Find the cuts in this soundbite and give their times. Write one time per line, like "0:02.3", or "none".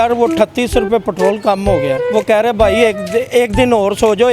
0:02.0